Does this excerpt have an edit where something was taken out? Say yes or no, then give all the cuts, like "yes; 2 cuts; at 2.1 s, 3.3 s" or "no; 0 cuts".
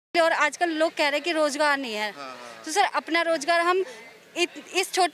no; 0 cuts